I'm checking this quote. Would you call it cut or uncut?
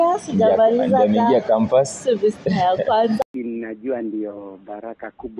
cut